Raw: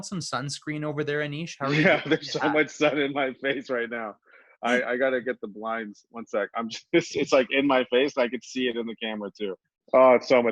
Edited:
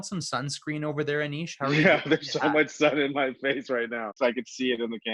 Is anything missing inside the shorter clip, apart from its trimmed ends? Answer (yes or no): yes